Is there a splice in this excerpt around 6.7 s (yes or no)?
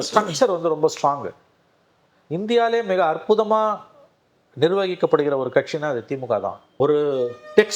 yes